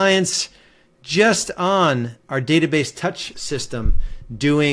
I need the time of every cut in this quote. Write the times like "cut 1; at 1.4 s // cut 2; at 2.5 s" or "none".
cut 1; at 3.2 s